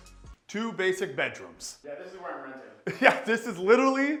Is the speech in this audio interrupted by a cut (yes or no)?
no